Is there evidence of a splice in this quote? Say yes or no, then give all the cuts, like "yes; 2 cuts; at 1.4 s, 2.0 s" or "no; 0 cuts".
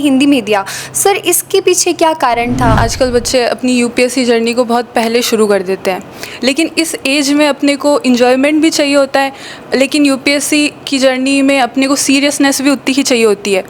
yes; 1 cut; at 2.8 s